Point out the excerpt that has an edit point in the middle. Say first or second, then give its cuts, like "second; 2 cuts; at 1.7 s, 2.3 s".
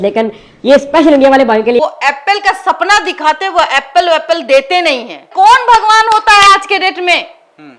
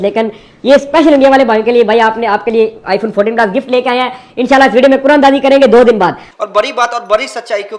first; 2 cuts; at 1.8 s, 5.3 s